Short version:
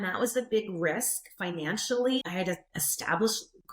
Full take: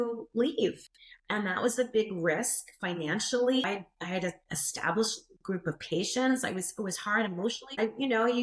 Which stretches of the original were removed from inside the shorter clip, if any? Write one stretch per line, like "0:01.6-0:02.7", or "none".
0:03.6-0:04.0